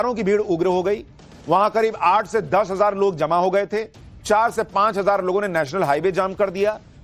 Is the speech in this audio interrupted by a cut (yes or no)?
no